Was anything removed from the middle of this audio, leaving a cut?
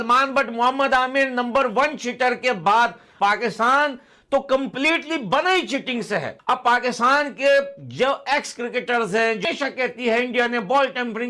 yes; 3 cuts; at 3.0 s, 6.3 s, 9.4 s

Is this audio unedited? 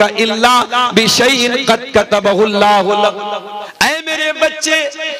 no; 1 cut; at 3.6 s

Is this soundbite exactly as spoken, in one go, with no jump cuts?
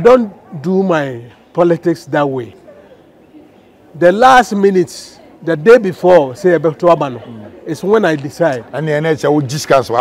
no; 1 cut; at 2.5 s

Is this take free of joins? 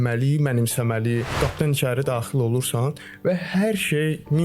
no; 1 cut; at 1.4 s

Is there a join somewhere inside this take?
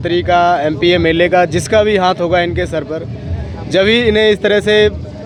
no; 0 cuts

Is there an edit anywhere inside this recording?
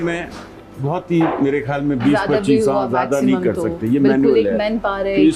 no; 0 cuts

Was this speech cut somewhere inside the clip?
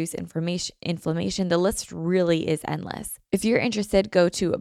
yes; 1 cut; at 3.1 s

